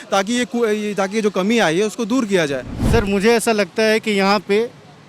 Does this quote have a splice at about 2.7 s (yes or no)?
yes